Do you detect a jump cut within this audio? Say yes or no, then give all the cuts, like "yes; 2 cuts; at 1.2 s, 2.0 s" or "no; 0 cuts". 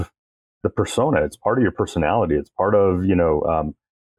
no; 0 cuts